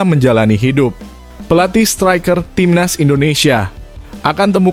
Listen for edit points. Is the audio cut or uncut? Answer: uncut